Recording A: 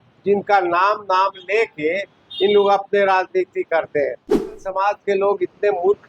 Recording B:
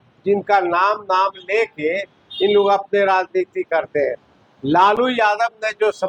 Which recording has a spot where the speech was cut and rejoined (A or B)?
A